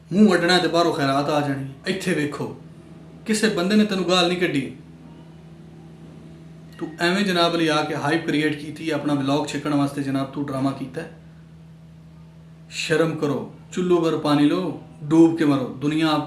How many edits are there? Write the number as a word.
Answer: one